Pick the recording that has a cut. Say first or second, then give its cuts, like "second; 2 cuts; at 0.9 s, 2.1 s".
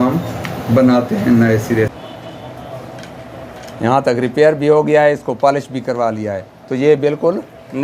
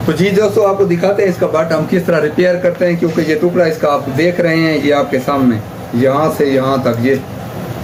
first; 1 cut; at 1.9 s